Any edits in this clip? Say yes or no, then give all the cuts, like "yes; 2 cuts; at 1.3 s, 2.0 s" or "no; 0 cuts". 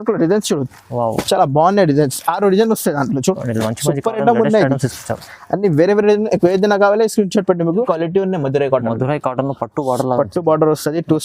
yes; 1 cut; at 7.8 s